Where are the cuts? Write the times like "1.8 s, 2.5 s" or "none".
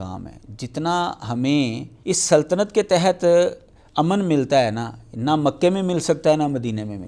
1.9 s